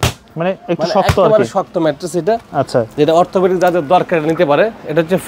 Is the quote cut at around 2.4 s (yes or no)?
no